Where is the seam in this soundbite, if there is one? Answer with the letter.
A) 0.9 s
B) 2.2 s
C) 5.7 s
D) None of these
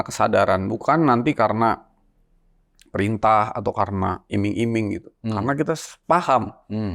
D